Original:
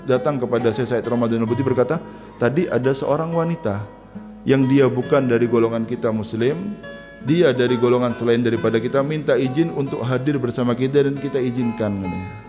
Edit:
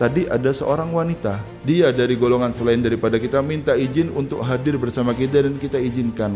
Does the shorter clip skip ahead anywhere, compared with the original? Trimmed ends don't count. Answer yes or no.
yes